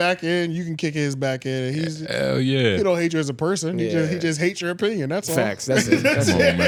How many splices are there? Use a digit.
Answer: 0